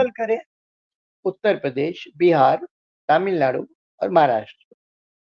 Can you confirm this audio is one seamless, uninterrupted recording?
no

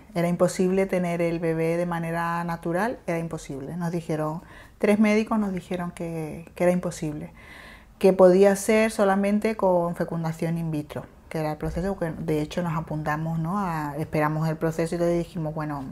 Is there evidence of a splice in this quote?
no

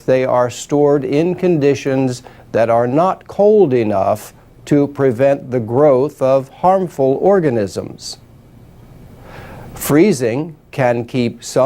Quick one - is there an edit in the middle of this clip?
yes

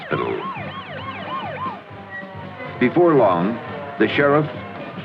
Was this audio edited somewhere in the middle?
no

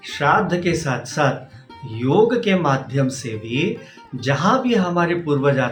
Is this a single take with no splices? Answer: yes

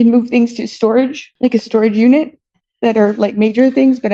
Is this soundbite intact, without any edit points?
no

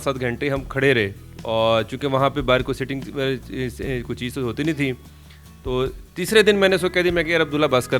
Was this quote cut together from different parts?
no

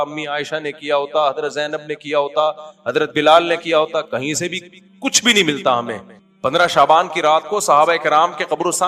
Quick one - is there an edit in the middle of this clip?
no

